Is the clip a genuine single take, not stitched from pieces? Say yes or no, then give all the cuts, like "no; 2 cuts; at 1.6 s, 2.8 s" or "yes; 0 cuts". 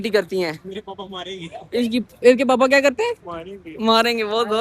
yes; 0 cuts